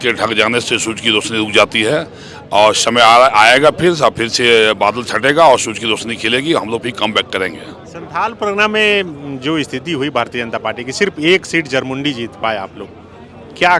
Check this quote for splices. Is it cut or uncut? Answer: uncut